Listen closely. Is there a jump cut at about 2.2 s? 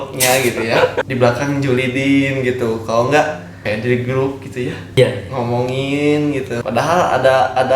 no; 4 cuts; at 1.0 s, 3.5 s, 5.0 s, 6.6 s

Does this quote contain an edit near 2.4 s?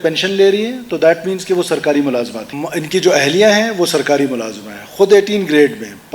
yes; 1 cut; at 2.4 s

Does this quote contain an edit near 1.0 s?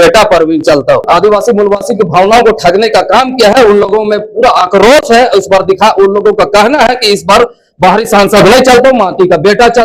yes; 1 cut; at 1.0 s

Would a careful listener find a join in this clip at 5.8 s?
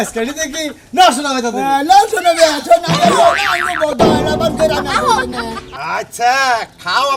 yes; 1 cut; at 5.8 s

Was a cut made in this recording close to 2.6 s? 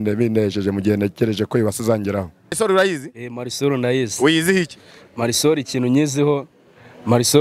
yes; 1 cut; at 2.6 s

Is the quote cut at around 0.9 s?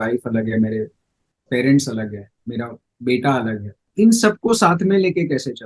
no; 1 cut; at 3.8 s

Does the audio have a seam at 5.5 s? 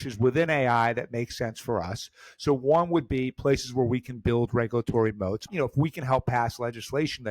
yes; 1 cut; at 5.5 s

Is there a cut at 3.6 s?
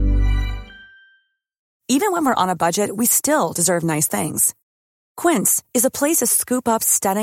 no; 1 cut; at 1.8 s

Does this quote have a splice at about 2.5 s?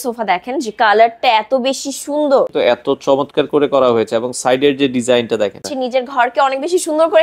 yes; 2 cuts; at 2.5 s, 5.7 s

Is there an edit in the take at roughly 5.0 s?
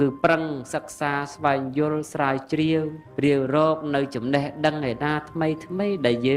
no; 1 cut; at 3.0 s

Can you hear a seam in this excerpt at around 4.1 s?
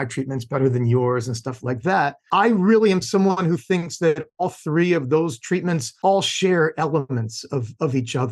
no; 2 cuts; at 2.2 s, 5.9 s

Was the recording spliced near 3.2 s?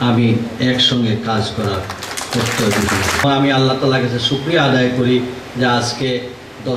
yes; 1 cut; at 3.2 s

